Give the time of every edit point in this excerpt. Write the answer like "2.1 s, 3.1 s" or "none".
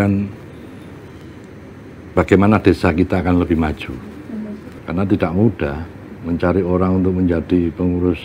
4.7 s